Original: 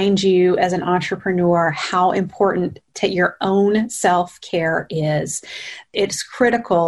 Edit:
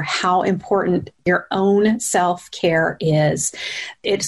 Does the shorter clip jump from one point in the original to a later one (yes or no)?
yes